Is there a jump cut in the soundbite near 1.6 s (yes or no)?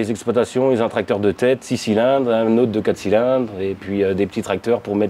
no